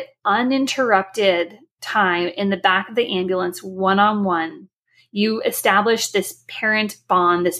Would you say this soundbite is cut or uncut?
uncut